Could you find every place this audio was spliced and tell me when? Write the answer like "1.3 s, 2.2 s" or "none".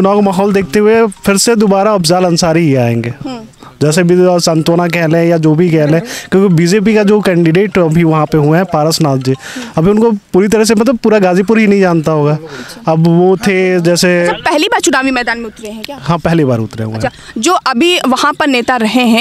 none